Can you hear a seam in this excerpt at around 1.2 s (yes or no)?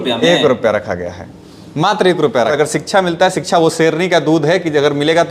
no